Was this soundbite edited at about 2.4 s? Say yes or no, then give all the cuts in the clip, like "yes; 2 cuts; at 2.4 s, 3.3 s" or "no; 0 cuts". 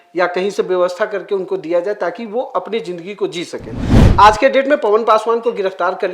no; 1 cut; at 3.9 s